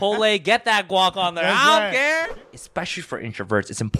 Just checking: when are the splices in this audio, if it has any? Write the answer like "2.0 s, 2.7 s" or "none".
2.4 s